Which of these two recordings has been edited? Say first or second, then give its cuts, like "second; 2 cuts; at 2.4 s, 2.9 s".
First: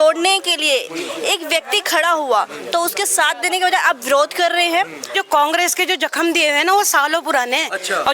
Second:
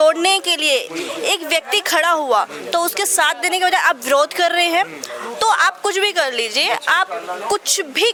first; 1 cut; at 5.1 s